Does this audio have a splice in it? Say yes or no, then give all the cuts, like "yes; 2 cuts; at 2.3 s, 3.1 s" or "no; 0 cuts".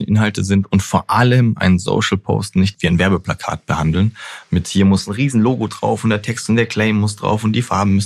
yes; 1 cut; at 2.7 s